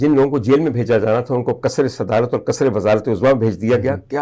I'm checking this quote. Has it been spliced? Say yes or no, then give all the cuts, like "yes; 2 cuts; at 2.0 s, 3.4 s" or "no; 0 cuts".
no; 0 cuts